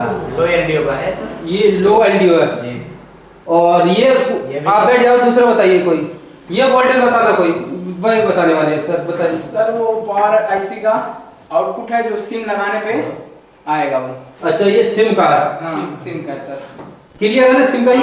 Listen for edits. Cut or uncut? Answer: uncut